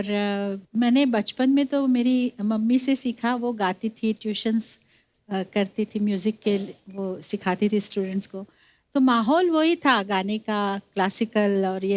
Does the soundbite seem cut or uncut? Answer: uncut